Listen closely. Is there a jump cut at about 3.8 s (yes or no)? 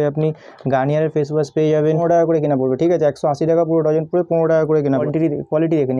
no